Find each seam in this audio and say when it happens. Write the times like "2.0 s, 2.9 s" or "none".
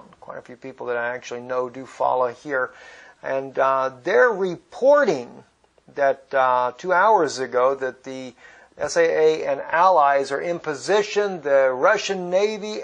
11.9 s